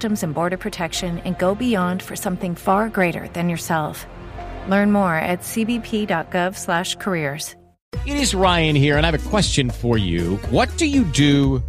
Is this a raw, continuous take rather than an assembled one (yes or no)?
no